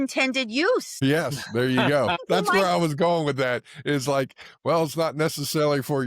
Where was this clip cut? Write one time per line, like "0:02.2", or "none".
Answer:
0:00.9
0:02.2